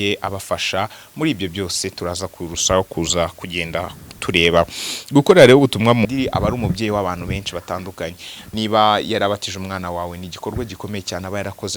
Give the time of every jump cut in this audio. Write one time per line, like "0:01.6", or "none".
0:06.1